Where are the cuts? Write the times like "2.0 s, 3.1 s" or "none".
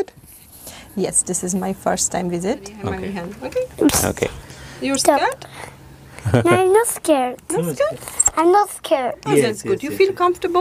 2.7 s